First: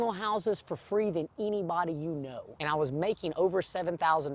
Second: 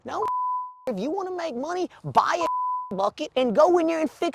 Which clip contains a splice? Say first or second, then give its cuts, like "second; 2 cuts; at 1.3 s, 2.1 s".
first; 1 cut; at 2.5 s